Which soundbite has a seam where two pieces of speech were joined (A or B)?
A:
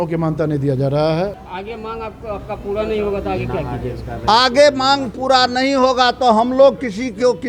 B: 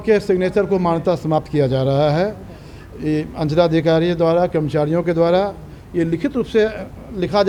A